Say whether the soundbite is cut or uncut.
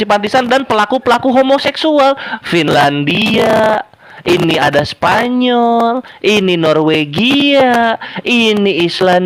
uncut